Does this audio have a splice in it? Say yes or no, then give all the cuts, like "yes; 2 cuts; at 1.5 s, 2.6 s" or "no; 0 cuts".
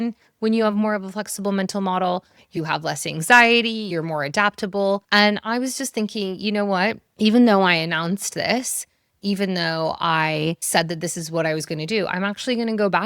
yes; 4 cuts; at 2.5 s, 3.9 s, 5.0 s, 10.6 s